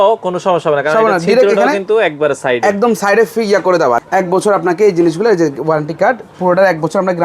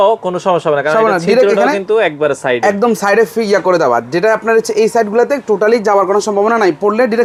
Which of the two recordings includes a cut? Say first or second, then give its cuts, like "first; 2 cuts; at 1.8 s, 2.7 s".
first; 1 cut; at 4.0 s